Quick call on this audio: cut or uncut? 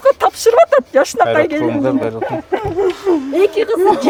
uncut